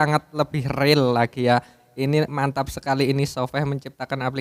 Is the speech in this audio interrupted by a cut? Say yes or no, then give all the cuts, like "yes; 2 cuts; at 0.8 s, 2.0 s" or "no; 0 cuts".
no; 0 cuts